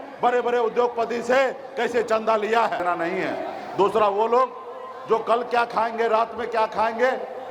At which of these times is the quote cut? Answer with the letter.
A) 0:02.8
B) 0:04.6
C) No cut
A